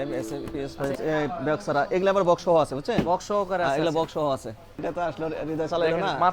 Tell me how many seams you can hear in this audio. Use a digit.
2